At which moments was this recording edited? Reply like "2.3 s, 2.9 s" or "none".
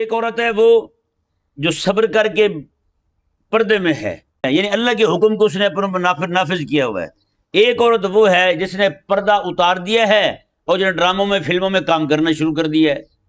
4.5 s

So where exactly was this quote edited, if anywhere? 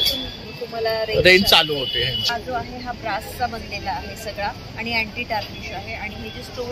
2.3 s

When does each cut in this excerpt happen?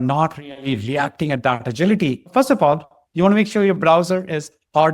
2.3 s

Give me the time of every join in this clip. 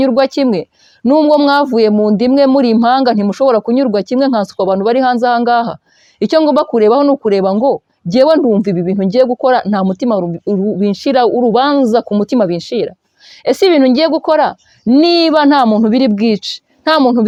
none

